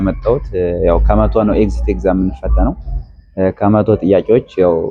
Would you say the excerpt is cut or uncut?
uncut